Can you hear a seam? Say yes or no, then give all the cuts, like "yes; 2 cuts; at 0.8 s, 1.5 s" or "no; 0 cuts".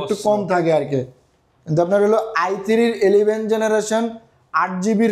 no; 0 cuts